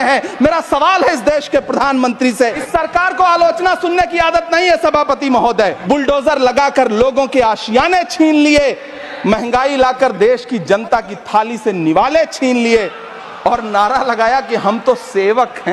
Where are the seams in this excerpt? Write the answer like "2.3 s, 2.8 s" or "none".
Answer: 2.6 s, 5.8 s